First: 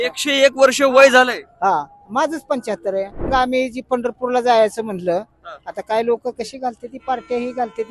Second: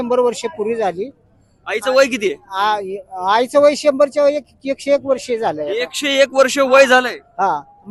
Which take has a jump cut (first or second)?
first